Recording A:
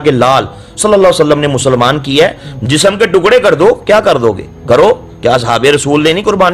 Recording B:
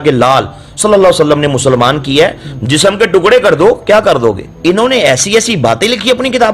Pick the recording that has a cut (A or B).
B